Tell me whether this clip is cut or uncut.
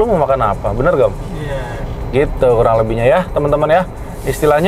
uncut